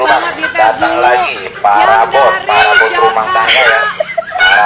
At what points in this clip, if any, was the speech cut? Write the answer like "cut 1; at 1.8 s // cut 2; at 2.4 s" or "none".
none